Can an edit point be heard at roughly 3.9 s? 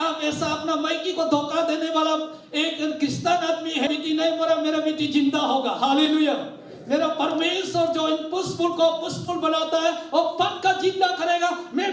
yes; 1 cut; at 3.9 s

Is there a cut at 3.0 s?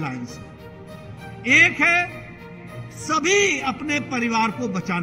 no; 0 cuts

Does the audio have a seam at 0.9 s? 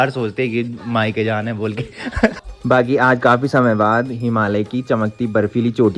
no; 1 cut; at 2.4 s

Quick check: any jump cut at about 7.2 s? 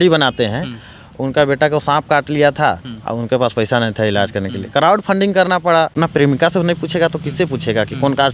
no; 1 cut; at 5.9 s

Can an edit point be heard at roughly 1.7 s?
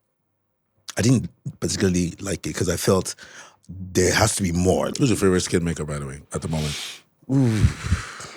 no; 1 cut; at 4.9 s

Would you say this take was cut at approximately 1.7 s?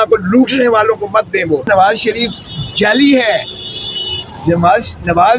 yes; 1 cut; at 1.7 s

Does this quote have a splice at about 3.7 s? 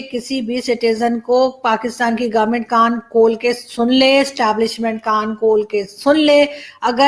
no; 0 cuts

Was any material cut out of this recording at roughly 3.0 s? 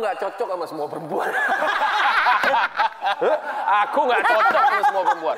no; 0 cuts

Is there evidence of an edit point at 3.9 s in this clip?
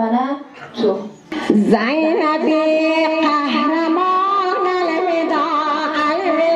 no; 1 cut; at 1.3 s

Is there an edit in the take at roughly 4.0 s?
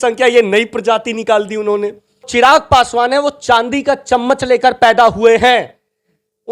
no; 1 cut; at 2.3 s

